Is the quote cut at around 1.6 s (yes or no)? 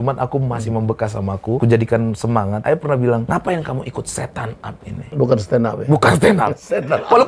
yes